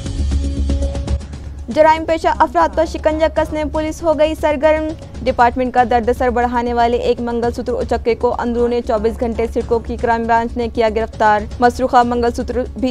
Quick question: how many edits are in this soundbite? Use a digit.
1